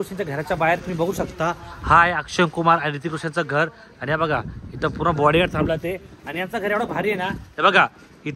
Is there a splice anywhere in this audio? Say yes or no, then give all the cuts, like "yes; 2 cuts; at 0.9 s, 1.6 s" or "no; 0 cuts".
no; 0 cuts